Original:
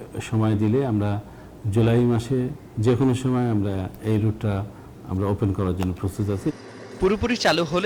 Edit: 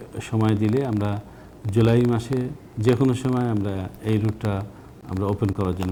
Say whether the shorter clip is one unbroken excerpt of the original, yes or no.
yes